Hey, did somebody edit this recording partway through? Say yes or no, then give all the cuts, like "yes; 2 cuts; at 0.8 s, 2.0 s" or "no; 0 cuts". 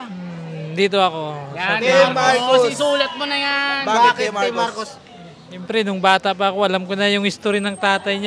no; 0 cuts